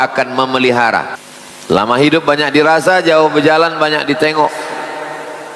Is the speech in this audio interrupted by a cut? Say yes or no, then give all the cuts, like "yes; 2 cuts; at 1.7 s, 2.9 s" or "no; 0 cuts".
yes; 1 cut; at 1.2 s